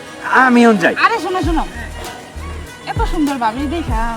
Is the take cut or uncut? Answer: uncut